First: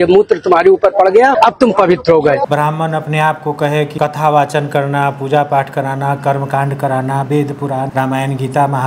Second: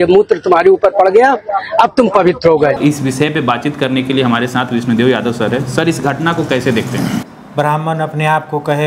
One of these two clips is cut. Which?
first; 4 cuts; at 1.3 s, 2.4 s, 3.9 s, 7.9 s

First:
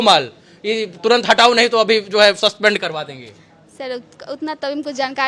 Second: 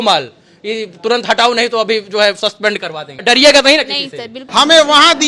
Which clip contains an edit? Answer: second; 2 cuts; at 3.2 s, 4.4 s

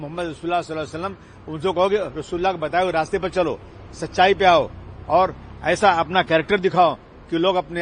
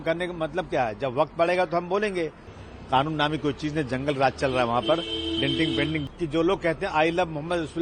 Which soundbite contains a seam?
second; 2 cuts; at 2.5 s, 6.1 s

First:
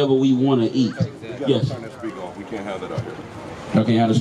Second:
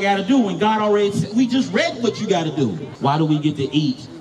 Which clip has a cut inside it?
second; 1 cut; at 2.9 s

